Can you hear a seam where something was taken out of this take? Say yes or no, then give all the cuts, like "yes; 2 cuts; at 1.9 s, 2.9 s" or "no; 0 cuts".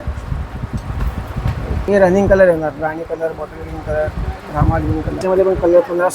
yes; 2 cuts; at 1.9 s, 5.2 s